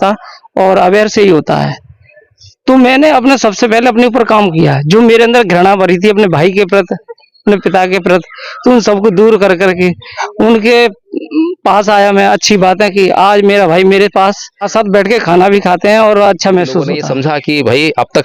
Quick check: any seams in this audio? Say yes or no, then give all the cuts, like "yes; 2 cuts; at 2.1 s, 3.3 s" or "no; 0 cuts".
yes; 2 cuts; at 14.6 s, 17.0 s